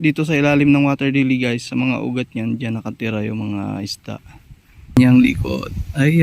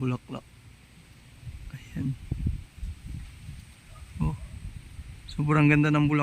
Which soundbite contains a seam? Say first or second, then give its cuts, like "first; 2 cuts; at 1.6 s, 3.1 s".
first; 1 cut; at 5.0 s